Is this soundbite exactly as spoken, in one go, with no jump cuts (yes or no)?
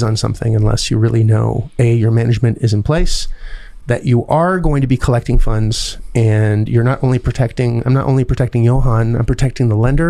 yes